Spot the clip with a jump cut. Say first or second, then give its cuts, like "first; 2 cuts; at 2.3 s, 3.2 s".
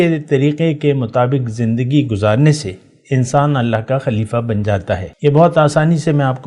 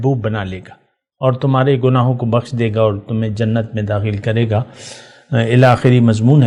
first; 1 cut; at 5.1 s